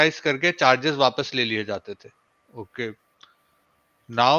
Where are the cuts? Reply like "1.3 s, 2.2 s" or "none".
none